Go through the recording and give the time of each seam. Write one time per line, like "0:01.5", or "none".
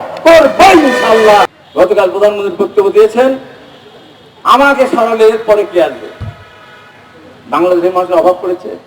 0:01.6